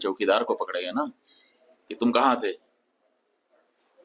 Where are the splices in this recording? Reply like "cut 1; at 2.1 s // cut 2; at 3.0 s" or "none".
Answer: none